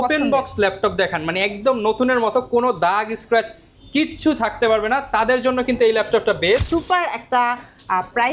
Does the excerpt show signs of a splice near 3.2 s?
no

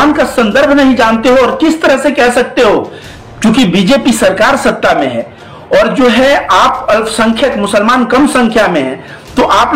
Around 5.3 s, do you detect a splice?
no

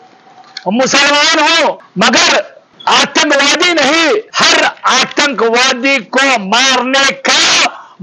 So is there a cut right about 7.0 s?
no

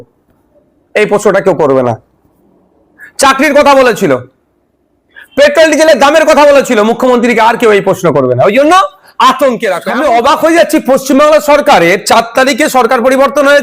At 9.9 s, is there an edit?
yes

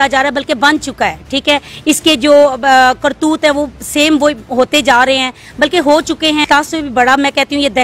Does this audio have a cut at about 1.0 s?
no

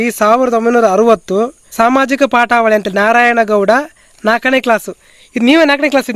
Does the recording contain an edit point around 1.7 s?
yes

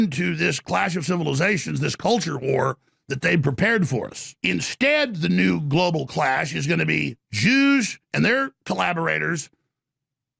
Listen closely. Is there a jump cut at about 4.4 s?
yes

